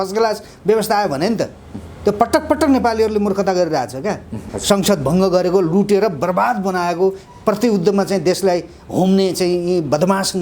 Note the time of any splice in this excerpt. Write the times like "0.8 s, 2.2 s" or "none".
4.5 s